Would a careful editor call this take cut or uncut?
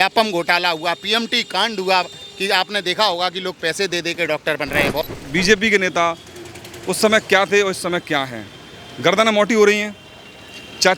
cut